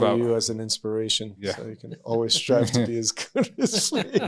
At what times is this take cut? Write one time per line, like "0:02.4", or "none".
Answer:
none